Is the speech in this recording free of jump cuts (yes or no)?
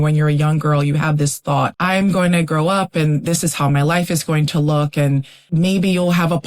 no